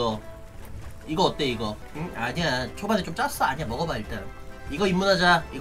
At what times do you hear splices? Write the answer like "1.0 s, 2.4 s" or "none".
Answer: 1.9 s

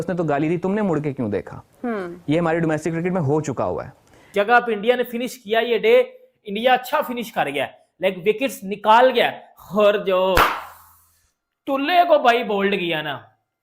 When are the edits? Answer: 4.3 s

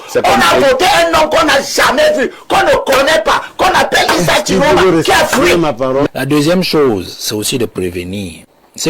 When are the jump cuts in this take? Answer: 6.1 s

